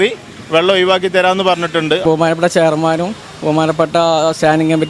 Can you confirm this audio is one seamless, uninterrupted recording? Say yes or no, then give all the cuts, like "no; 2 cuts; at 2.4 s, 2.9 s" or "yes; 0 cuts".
no; 1 cut; at 2.0 s